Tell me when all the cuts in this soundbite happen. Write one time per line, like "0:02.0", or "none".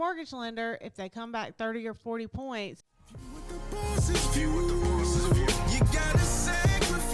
0:02.8